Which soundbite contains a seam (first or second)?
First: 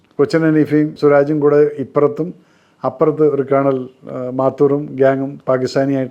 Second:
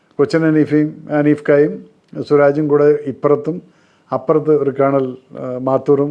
first